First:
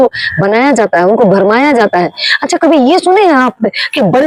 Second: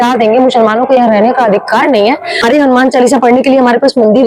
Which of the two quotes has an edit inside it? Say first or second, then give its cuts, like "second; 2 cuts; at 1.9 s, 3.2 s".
second; 1 cut; at 2.4 s